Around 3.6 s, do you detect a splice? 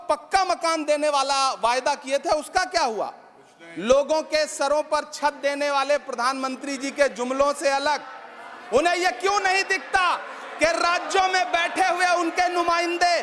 no; 0 cuts

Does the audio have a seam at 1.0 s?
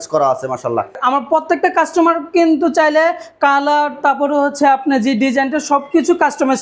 yes; 1 cut; at 1.0 s

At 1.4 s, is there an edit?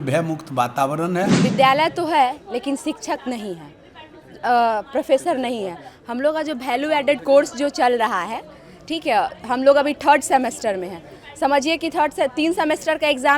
yes; 1 cut; at 1.4 s

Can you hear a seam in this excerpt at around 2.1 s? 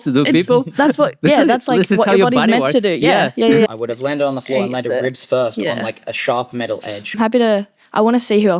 no; 2 cuts; at 3.7 s, 7.2 s

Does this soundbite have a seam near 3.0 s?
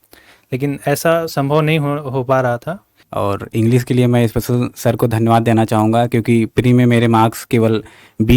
yes; 1 cut; at 3.0 s

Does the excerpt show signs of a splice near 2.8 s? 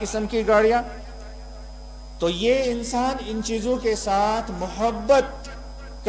no; 0 cuts

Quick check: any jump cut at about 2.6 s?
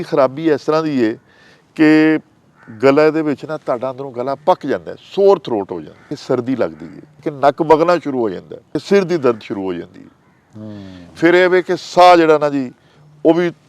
no; 3 cuts; at 6.1 s, 7.3 s, 8.8 s

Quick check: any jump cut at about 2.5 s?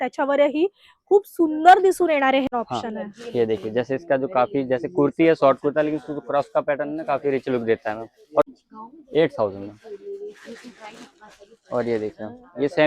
yes; 2 cuts; at 2.5 s, 8.5 s

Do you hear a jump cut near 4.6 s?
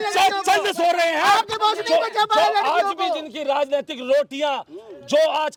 no; 0 cuts

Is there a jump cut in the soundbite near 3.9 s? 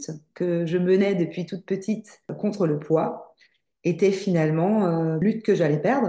no; 2 cuts; at 2.3 s, 5.2 s

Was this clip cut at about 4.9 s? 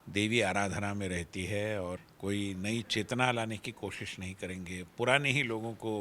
no; 1 cut; at 2.0 s

